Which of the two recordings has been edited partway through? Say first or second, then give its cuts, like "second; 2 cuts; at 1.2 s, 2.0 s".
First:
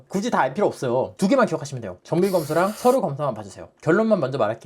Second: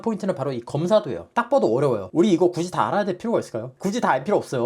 second; 1 cut; at 1.2 s